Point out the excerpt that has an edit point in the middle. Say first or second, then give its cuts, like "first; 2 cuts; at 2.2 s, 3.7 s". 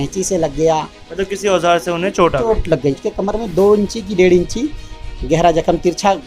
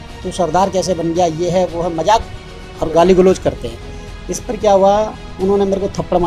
first; 1 cut; at 3.0 s